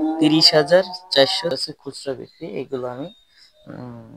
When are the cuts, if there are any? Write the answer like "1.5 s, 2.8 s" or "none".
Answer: 1.5 s